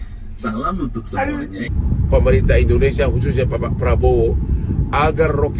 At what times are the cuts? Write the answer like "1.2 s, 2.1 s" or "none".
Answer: 1.7 s